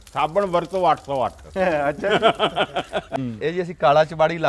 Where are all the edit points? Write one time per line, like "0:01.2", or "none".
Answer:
0:03.1